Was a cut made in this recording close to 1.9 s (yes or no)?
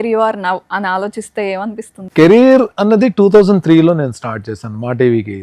yes